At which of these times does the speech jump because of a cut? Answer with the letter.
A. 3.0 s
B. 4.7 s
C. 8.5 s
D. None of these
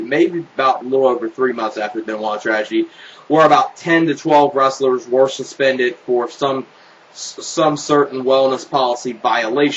D